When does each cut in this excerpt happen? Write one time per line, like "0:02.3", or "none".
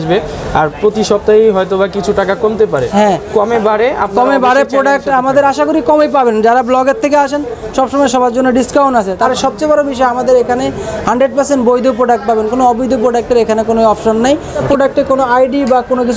0:09.3
0:14.6